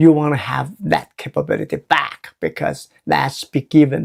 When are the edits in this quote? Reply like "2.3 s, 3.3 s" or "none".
none